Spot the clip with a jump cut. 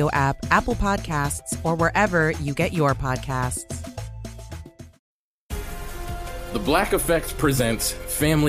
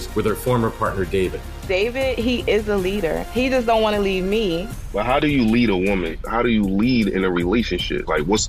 first; 1 cut; at 5.1 s

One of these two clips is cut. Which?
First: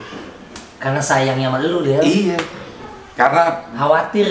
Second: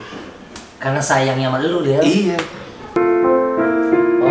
second; 1 cut; at 3.0 s

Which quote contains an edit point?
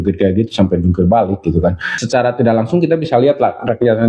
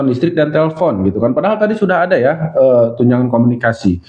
first; 1 cut; at 1.9 s

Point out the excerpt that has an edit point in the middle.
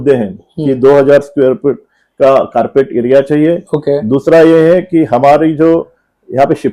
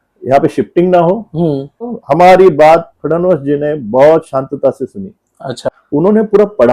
second; 2 cuts; at 2.0 s, 5.7 s

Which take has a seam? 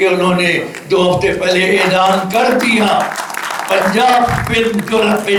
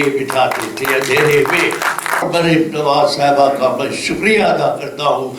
second; 1 cut; at 2.2 s

